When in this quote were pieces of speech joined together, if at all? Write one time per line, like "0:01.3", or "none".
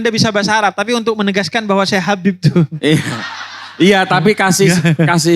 none